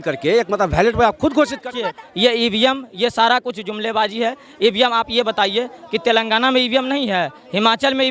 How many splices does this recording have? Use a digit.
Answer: 1